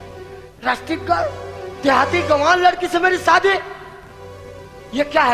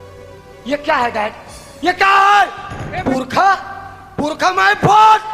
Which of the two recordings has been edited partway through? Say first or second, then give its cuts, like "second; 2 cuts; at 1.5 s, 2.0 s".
second; 1 cut; at 2.9 s